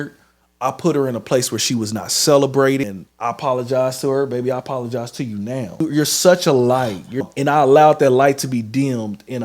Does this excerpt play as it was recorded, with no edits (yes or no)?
no